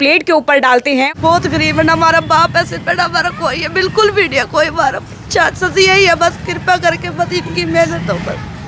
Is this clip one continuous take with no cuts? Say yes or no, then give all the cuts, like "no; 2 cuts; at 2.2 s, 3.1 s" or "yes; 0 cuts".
no; 1 cut; at 1.1 s